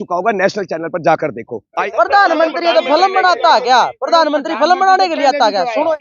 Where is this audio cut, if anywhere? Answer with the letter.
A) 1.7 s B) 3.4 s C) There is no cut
A